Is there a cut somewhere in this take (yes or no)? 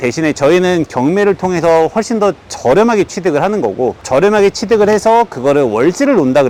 no